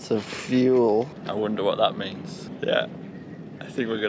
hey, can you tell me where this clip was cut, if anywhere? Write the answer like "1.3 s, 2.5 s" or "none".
1.2 s, 2.5 s